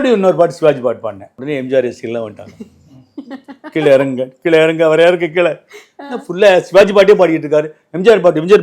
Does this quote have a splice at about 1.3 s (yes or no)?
yes